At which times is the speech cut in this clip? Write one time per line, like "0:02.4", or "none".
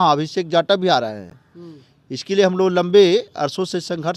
none